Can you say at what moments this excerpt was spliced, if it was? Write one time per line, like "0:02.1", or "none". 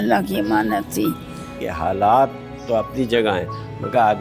0:01.6